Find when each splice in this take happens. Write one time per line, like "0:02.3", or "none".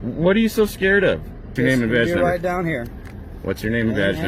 0:01.4